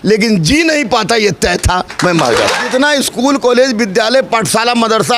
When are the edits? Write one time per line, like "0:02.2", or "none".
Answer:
0:02.6